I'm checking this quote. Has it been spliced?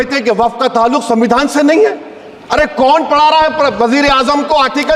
no; 0 cuts

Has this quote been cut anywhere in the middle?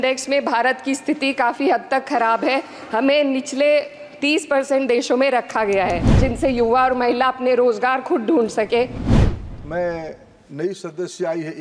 yes; 2 cuts; at 6.2 s, 9.1 s

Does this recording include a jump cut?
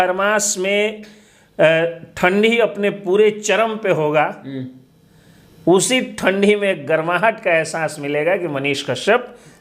no; 0 cuts

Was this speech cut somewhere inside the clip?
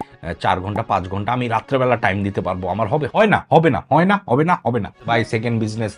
yes; 2 cuts; at 3.1 s, 5.0 s

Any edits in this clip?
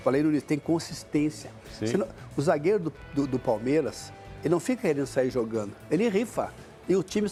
no; 0 cuts

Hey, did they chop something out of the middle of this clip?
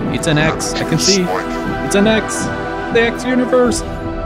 no; 0 cuts

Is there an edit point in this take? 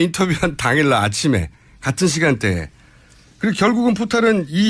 yes; 1 cut; at 2.9 s

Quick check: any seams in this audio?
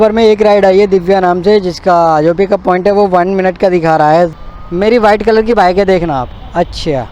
yes; 1 cut; at 4.3 s

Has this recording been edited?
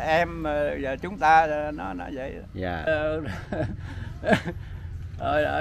yes; 1 cut; at 2.9 s

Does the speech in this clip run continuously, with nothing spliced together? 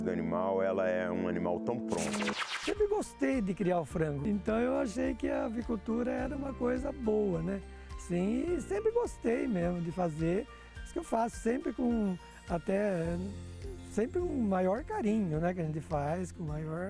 no; 1 cut; at 2.3 s

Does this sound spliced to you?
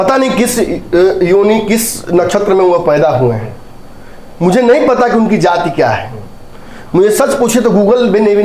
no; 0 cuts

